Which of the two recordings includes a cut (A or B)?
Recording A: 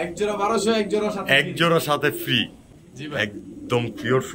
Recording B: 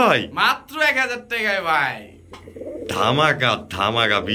A